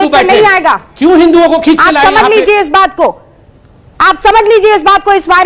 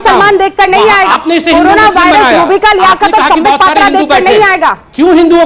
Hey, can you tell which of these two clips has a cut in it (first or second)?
second